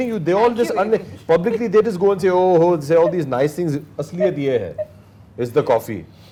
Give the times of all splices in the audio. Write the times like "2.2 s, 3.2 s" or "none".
none